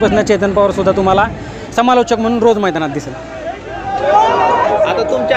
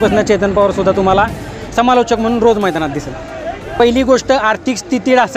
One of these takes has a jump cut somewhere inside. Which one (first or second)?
second